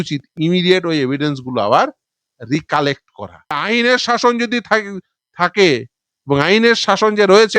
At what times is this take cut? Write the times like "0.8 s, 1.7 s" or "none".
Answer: 3.5 s